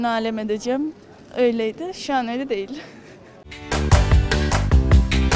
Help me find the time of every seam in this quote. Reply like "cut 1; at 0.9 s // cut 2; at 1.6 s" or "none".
cut 1; at 3.0 s